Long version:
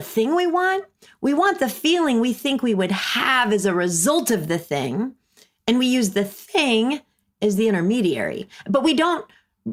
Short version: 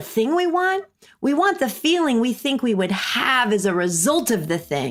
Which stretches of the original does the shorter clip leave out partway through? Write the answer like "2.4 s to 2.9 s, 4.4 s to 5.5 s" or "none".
none

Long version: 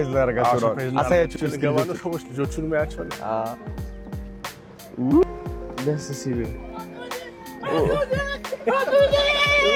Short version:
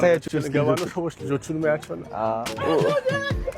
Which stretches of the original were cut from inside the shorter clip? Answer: 3.6 s to 7.6 s

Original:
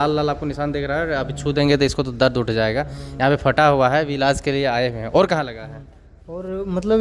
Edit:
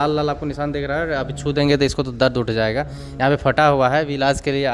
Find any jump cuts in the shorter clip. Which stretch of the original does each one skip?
none

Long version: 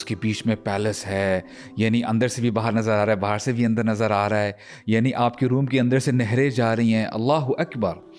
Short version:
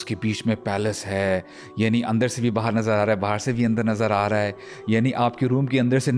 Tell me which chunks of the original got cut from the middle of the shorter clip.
none

